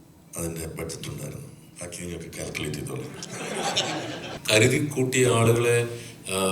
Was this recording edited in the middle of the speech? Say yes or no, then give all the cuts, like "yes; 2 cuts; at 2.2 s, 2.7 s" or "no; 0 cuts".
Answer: yes; 2 cuts; at 1.6 s, 4.3 s